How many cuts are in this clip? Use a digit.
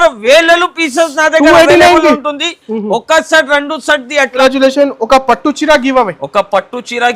1